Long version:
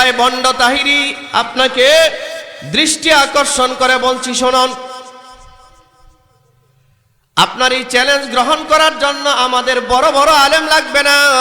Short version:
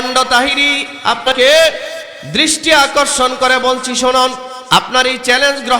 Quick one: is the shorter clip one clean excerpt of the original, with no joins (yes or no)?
no